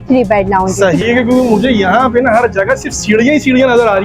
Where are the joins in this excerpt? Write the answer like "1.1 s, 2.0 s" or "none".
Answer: 1.0 s